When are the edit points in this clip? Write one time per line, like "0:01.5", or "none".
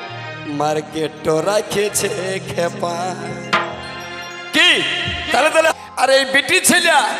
0:05.7